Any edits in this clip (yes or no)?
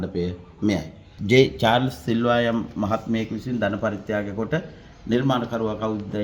yes